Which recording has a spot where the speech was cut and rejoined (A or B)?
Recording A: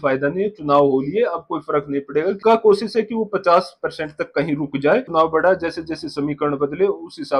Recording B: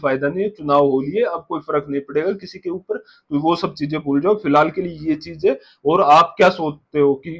A